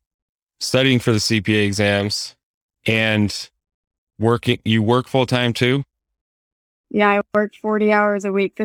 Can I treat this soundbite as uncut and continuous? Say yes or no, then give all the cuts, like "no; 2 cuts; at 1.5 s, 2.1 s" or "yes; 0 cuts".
yes; 0 cuts